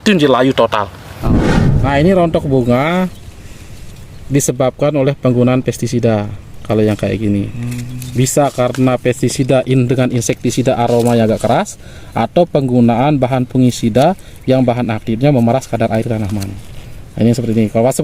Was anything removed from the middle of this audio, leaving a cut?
yes; 1 cut; at 1.3 s

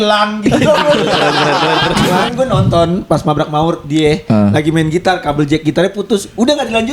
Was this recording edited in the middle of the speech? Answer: yes; 1 cut; at 2.0 s

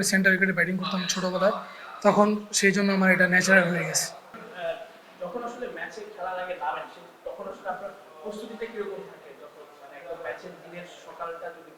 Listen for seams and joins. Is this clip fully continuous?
no; 1 cut; at 4.4 s

